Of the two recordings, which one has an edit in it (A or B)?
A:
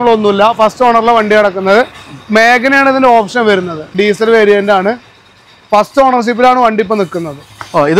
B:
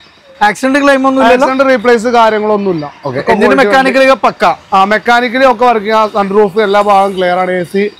A